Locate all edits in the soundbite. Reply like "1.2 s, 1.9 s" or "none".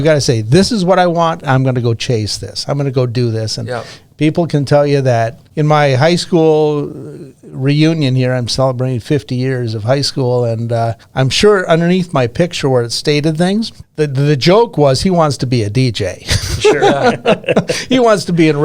5.4 s, 11.0 s, 13.8 s